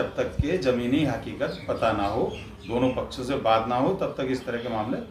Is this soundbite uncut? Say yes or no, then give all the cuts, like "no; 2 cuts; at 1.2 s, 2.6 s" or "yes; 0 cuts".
yes; 0 cuts